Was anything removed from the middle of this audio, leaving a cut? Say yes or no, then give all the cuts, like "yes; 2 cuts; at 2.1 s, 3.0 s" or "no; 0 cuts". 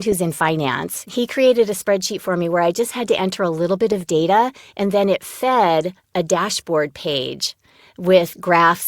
yes; 1 cut; at 1.0 s